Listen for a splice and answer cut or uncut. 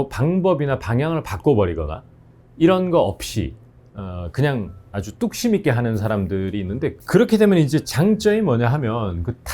cut